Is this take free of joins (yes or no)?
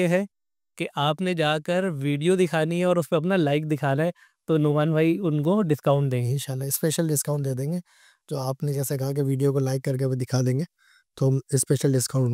yes